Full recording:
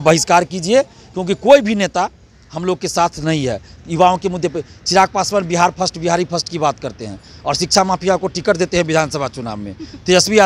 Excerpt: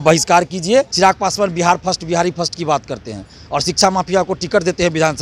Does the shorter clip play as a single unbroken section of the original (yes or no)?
no